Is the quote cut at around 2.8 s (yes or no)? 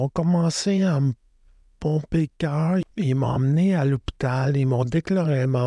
yes